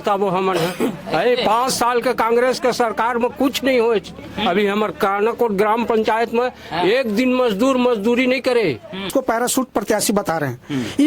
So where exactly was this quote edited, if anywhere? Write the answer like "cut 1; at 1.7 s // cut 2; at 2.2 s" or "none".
cut 1; at 9.1 s